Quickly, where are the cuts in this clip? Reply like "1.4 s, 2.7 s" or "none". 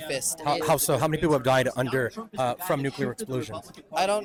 none